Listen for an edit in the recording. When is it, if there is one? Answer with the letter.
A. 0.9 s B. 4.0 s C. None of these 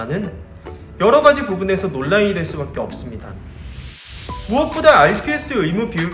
B